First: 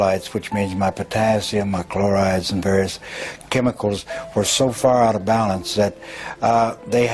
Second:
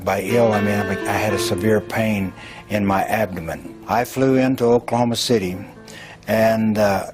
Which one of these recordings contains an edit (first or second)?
second